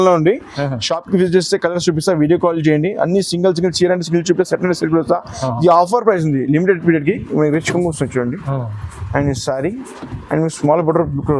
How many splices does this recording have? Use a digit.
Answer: 1